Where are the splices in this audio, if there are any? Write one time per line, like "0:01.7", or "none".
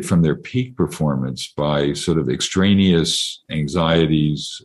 0:03.5